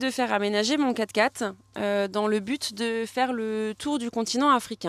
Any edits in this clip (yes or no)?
no